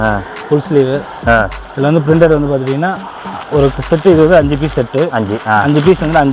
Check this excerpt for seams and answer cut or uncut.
uncut